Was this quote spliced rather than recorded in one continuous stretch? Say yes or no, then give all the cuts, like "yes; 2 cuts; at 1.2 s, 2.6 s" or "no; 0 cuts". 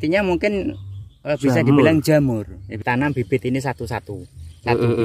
yes; 1 cut; at 2.8 s